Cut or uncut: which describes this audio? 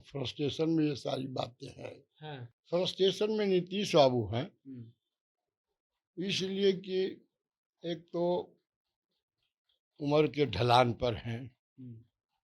cut